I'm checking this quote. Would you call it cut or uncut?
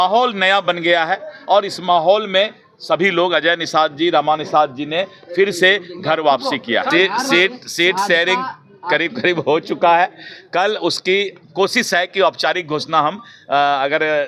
cut